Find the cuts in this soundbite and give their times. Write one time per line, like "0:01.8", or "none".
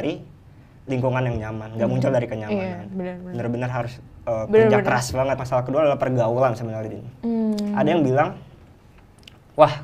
0:05.3